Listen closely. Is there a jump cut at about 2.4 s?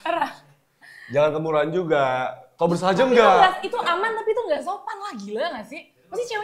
yes; 1 cut; at 2.4 s

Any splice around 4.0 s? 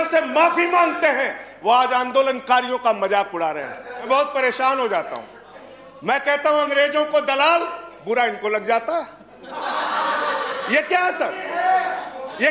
yes; 1 cut; at 4.0 s

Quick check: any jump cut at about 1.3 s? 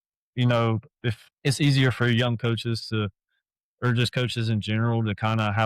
yes; 1 cut; at 1.3 s

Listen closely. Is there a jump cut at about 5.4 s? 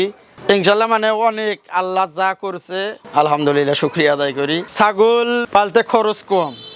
yes; 2 cuts; at 4.7 s, 5.4 s

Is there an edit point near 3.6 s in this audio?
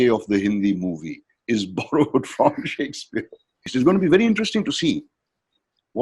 yes; 1 cut; at 3.6 s

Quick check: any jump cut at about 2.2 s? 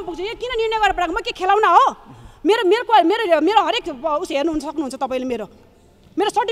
no; 0 cuts

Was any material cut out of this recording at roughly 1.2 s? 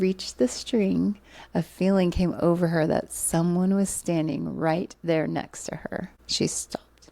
no; 0 cuts

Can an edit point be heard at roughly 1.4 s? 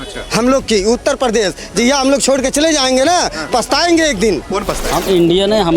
no; 1 cut; at 4.8 s

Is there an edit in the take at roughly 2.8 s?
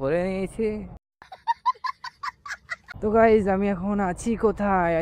yes; 1 cut; at 2.8 s

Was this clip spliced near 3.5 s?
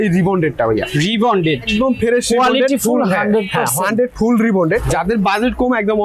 no; 2 cuts; at 1.7 s, 4.9 s

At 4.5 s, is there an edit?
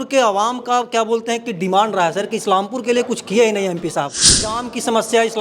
yes; 1 cut; at 4.5 s

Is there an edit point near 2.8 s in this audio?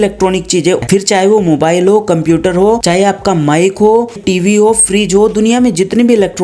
yes; 3 cuts; at 0.8 s, 2.8 s, 4.2 s

